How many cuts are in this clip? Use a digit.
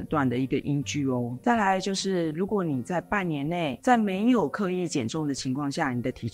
1